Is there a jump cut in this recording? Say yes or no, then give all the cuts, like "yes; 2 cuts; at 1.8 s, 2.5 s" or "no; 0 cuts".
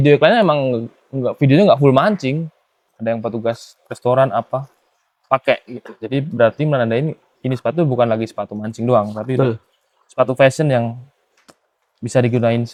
no; 0 cuts